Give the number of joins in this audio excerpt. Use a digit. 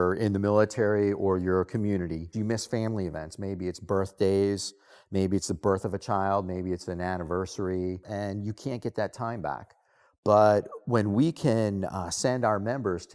2